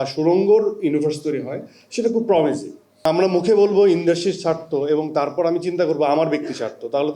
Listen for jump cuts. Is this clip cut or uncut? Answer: cut